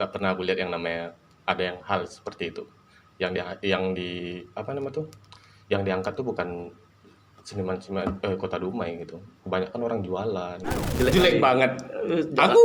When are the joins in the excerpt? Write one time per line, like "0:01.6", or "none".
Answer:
0:10.8